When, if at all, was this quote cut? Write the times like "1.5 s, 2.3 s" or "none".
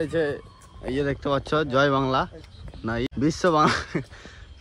3.1 s